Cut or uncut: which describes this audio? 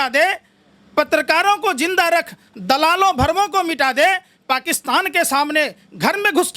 uncut